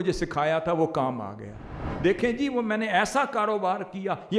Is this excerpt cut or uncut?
cut